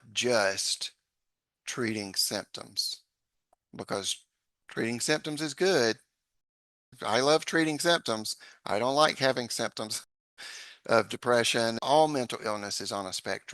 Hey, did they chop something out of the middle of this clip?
yes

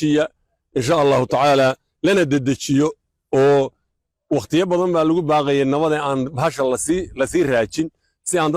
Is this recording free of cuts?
yes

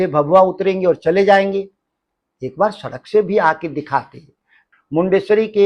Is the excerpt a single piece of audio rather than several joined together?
no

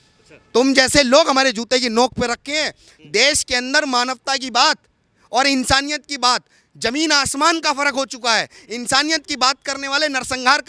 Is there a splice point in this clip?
no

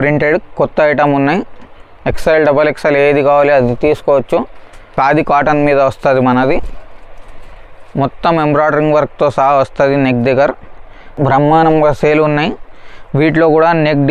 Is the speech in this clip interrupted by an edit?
yes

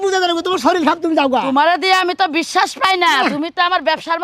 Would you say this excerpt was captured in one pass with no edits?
yes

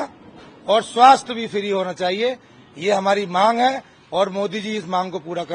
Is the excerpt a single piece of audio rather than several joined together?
yes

